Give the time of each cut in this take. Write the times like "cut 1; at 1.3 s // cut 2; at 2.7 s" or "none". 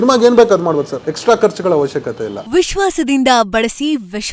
cut 1; at 1.0 s // cut 2; at 2.4 s